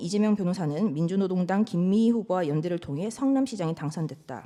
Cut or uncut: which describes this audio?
uncut